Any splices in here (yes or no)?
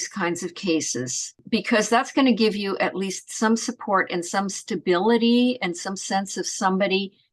no